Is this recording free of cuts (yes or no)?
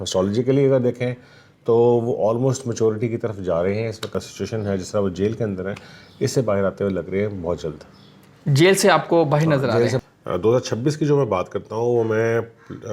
no